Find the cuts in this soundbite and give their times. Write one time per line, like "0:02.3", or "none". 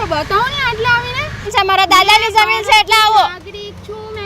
0:01.5